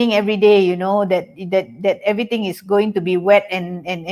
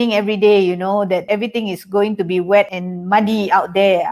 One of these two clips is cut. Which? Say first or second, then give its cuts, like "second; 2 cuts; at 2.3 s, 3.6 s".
second; 2 cuts; at 1.2 s, 2.7 s